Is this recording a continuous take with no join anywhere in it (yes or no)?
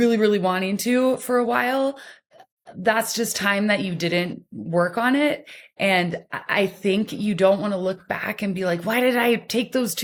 yes